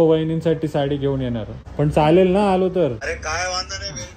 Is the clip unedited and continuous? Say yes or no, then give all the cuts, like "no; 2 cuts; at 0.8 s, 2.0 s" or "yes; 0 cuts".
no; 2 cuts; at 1.6 s, 3.0 s